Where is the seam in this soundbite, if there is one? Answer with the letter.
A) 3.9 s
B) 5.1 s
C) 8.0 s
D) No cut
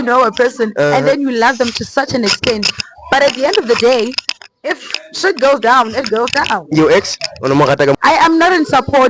C